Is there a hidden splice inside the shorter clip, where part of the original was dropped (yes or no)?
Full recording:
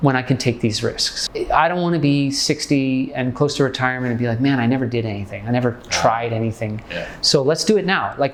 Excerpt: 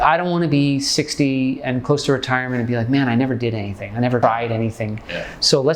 yes